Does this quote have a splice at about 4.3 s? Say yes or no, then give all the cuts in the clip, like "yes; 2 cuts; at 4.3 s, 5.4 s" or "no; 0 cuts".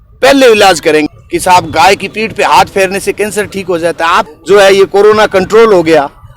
yes; 2 cuts; at 1.1 s, 4.3 s